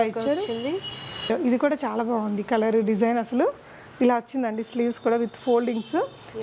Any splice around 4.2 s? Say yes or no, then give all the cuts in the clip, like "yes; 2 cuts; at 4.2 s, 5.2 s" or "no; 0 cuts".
no; 1 cut; at 1.3 s